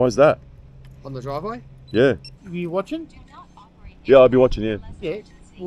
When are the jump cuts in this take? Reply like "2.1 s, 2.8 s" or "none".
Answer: 2.4 s